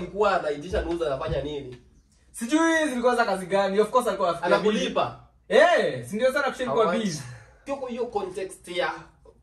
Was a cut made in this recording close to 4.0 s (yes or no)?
no